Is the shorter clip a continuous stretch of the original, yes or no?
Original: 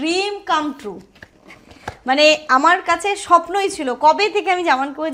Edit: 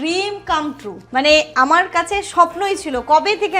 no